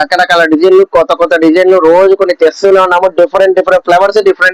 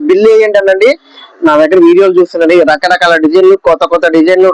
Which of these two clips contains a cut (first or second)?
second